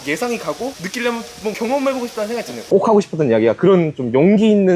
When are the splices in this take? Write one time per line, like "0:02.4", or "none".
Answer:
0:02.6